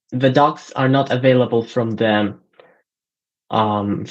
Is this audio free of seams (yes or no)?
yes